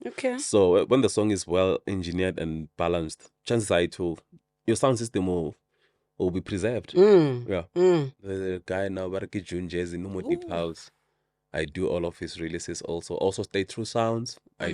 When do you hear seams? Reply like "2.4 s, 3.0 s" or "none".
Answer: 8.2 s